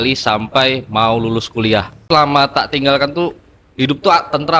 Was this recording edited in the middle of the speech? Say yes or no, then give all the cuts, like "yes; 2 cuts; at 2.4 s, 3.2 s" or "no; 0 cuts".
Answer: yes; 1 cut; at 2.0 s